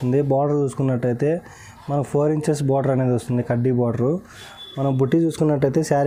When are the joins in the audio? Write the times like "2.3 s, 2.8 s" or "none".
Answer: none